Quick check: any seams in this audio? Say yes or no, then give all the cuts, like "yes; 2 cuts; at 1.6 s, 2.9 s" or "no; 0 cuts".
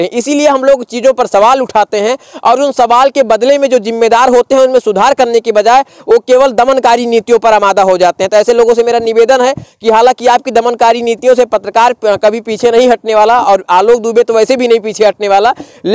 no; 0 cuts